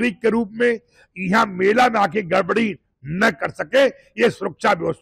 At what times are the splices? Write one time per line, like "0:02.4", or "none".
none